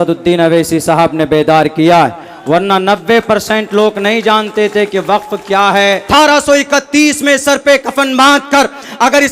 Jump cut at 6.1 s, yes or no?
yes